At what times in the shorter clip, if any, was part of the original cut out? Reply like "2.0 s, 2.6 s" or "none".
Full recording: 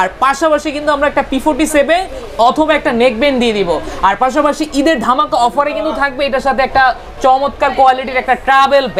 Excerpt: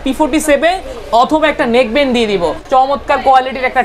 2.6 s